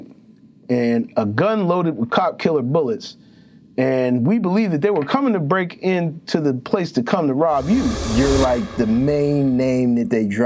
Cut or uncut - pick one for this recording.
cut